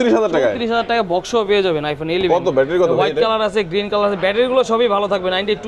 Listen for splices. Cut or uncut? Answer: uncut